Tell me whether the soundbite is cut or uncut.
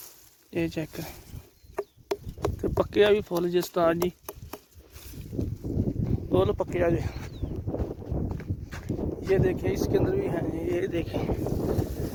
uncut